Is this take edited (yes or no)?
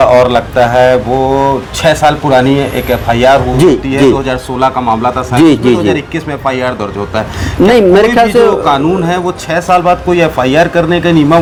no